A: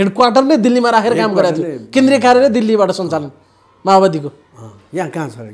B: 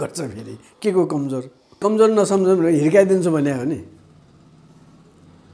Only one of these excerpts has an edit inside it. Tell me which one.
B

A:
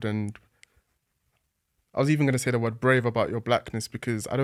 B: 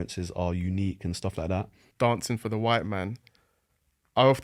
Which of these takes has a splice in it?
B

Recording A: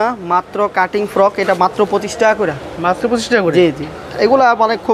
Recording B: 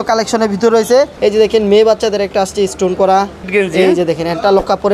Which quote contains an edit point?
B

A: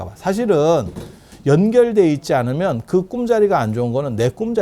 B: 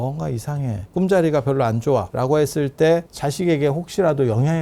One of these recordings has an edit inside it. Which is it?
B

